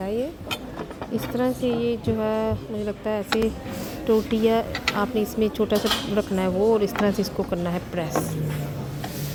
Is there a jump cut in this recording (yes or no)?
no